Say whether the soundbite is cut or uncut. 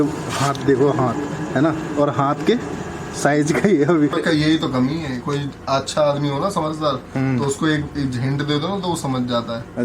cut